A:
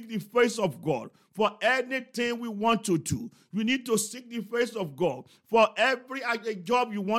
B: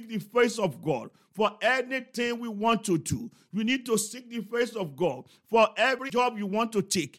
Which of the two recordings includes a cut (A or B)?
B